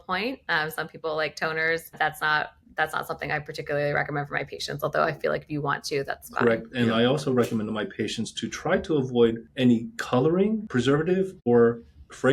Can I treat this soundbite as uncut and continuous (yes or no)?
no